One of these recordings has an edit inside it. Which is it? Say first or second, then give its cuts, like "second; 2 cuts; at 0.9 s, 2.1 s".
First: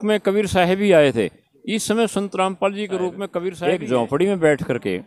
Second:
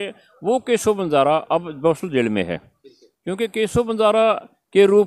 first; 1 cut; at 3.5 s